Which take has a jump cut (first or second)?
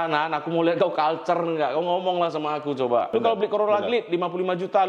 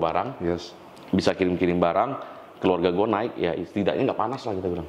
first